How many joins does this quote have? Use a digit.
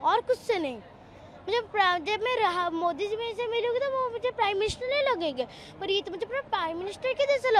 0